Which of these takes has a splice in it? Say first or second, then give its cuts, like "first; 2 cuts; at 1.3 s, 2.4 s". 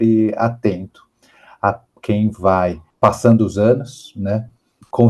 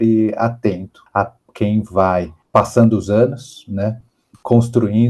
second; 1 cut; at 0.9 s